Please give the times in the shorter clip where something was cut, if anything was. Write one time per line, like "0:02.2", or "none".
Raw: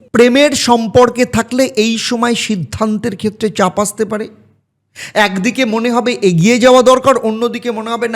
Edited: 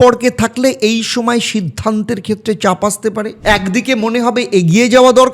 0:03.3